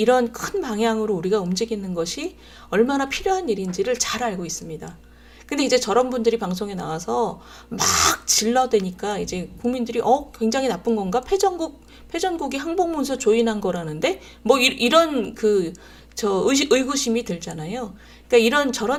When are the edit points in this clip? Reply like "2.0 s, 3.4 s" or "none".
none